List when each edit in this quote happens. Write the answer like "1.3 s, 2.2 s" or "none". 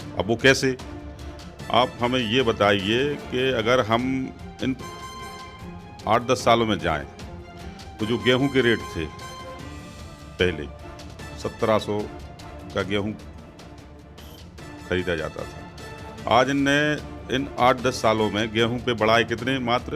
none